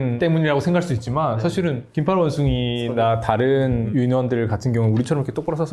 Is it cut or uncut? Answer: uncut